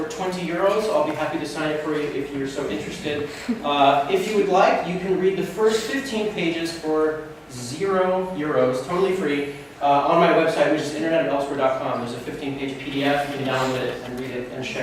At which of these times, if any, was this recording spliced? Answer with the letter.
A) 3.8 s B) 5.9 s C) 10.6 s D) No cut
D